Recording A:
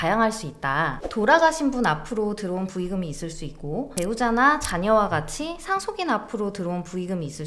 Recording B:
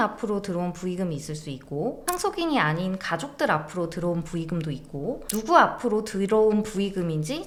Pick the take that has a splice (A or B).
A